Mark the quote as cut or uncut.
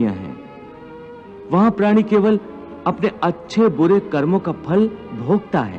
uncut